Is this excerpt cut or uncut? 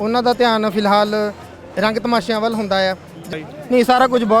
cut